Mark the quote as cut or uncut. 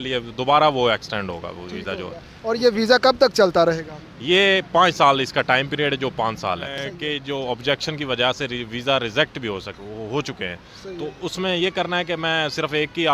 cut